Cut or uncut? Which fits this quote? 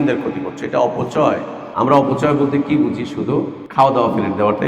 cut